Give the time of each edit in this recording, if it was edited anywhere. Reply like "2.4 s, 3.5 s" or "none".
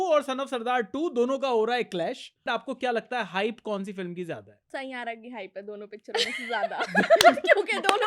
2.4 s, 4.5 s